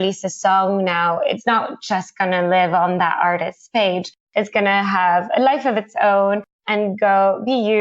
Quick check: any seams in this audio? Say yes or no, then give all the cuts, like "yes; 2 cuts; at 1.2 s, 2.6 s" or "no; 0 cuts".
yes; 1 cut; at 1.4 s